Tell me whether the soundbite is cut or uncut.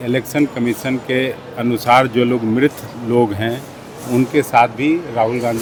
uncut